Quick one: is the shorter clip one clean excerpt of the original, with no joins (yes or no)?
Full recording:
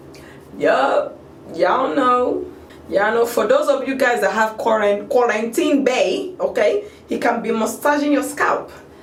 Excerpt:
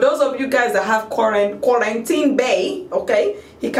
yes